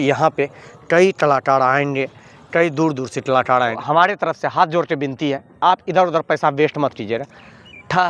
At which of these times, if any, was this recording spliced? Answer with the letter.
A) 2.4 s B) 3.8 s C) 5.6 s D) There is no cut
B